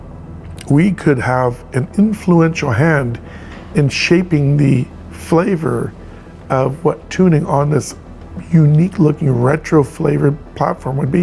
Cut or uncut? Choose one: uncut